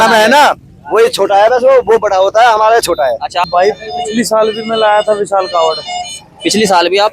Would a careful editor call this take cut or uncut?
cut